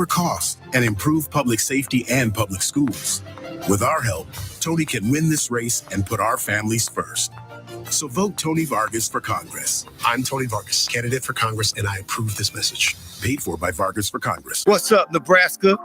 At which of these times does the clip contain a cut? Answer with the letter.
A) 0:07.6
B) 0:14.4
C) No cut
B